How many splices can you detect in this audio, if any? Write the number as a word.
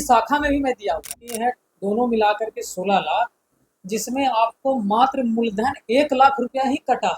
one